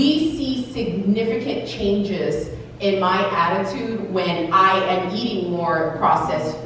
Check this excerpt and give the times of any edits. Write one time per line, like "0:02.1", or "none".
none